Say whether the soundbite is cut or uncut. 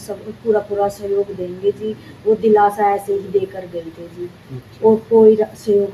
uncut